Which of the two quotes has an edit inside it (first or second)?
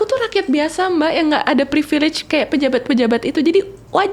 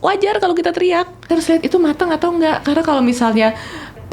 second